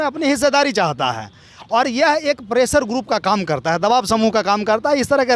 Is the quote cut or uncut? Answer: uncut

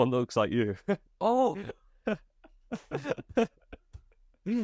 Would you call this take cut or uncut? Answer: uncut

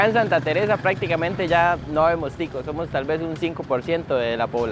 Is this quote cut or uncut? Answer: uncut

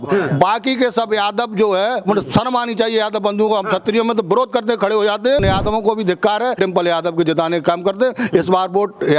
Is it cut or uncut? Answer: cut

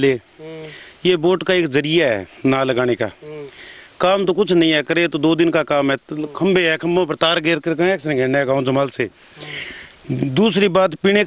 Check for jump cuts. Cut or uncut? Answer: uncut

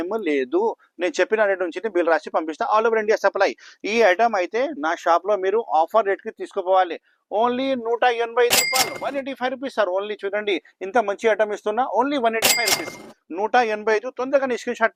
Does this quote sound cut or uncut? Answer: uncut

